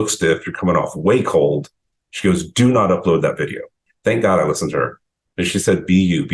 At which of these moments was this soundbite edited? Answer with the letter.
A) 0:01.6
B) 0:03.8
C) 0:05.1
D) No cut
B